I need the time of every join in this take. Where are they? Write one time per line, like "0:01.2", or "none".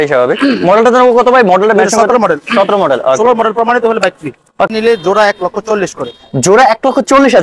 0:04.7